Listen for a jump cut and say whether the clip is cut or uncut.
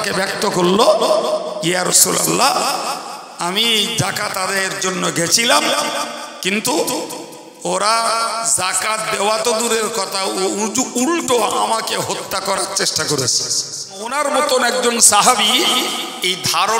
cut